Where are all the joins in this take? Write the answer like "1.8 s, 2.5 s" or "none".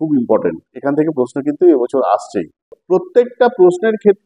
2.7 s